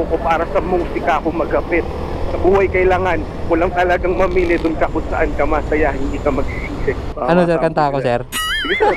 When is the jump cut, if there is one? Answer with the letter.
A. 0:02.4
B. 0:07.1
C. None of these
B